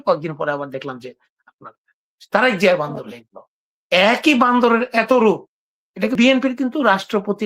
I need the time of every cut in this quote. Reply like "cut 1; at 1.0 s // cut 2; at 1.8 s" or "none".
cut 1; at 6.1 s